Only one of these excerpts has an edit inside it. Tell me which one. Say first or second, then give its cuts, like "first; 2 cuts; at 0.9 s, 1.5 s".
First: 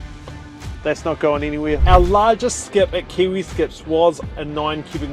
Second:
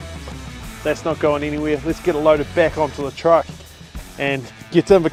first; 1 cut; at 1.8 s